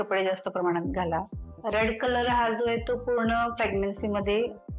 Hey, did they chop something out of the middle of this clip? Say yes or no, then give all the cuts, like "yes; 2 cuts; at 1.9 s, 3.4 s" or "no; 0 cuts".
yes; 1 cut; at 1.4 s